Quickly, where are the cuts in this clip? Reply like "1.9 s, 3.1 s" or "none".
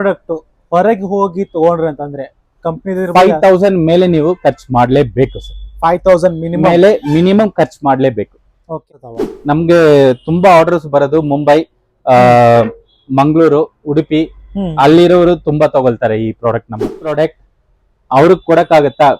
8.9 s, 17.0 s